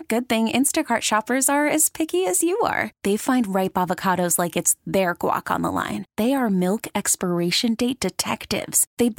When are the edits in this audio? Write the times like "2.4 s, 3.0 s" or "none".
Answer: none